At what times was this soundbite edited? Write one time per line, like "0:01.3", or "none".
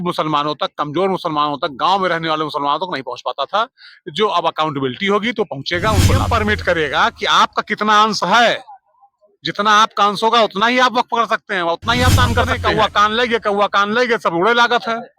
0:06.3
0:12.5